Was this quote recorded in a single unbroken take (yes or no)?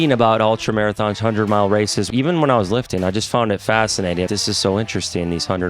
no